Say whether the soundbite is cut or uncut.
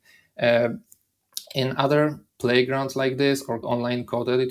cut